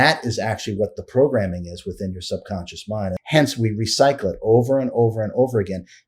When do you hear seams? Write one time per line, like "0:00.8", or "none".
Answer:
0:03.2